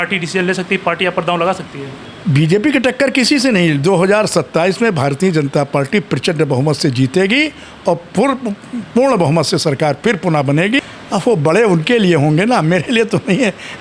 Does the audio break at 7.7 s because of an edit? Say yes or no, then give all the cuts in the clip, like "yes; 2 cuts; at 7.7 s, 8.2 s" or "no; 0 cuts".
no; 2 cuts; at 2.1 s, 10.8 s